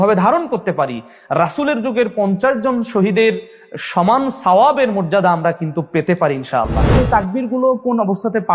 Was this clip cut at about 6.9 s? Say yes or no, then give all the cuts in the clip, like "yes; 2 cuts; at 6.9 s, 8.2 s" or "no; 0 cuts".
yes; 1 cut; at 6.9 s